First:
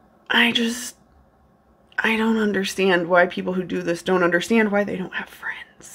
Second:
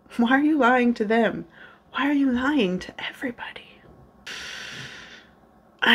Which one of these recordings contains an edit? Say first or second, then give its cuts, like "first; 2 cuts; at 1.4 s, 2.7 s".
second; 1 cut; at 4.3 s